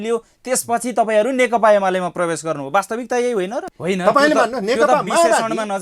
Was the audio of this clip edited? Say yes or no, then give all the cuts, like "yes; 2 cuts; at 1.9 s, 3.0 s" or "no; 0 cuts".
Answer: yes; 1 cut; at 3.5 s